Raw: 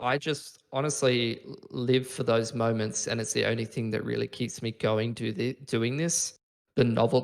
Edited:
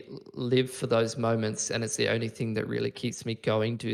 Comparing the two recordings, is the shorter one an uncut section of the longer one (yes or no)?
yes